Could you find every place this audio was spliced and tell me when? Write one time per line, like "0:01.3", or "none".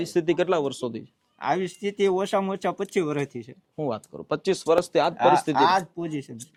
none

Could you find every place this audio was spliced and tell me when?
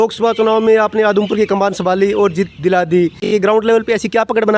0:03.3

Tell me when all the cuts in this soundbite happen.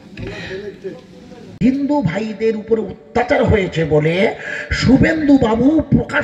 0:01.7

